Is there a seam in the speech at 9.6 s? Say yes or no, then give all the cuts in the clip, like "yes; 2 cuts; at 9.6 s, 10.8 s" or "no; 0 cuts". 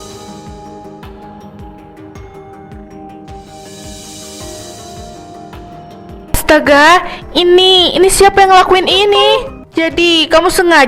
yes; 1 cut; at 9.6 s